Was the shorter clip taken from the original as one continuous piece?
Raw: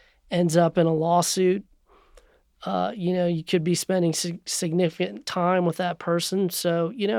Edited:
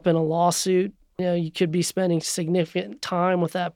no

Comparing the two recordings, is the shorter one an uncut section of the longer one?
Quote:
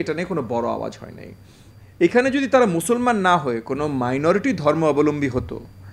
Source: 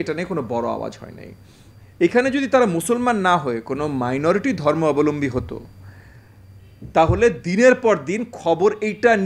yes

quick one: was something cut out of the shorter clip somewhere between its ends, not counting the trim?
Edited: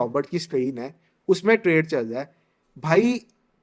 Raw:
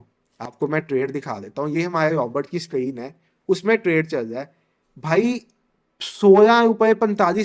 no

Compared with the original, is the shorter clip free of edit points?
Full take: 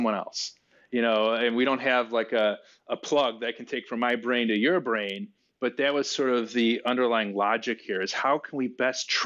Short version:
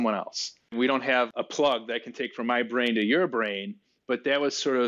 no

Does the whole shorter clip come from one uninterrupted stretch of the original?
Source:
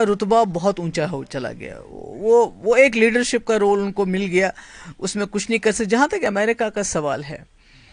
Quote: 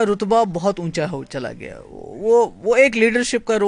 yes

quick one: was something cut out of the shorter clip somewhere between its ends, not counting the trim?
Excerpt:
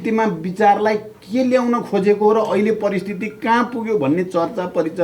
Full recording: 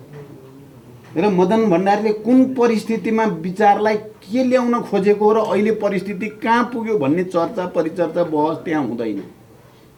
no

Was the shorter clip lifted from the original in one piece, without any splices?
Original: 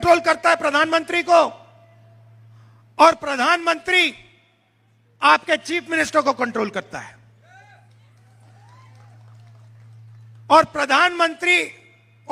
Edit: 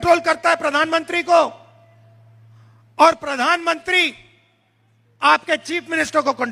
yes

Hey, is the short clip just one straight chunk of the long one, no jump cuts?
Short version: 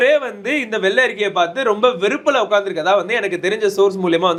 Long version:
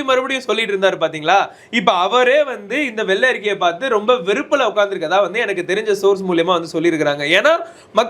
yes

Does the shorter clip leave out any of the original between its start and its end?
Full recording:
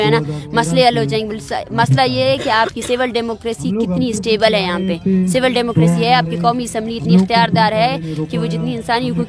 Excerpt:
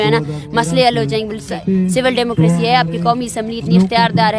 yes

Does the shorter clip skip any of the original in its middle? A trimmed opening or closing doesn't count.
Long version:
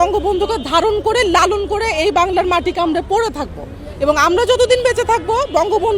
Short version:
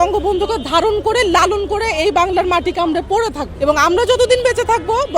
yes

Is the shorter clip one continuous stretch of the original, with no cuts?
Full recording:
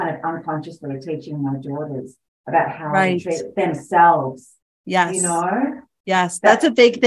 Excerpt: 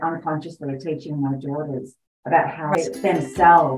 no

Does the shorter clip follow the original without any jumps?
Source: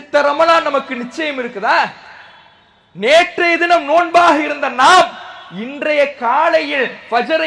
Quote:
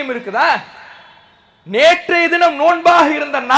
yes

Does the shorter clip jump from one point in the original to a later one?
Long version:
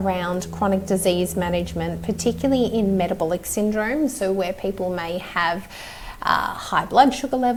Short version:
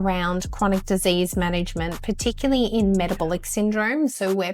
no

